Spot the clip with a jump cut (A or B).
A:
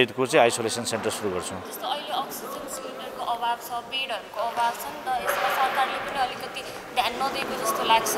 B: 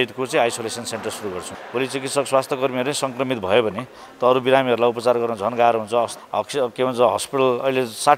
B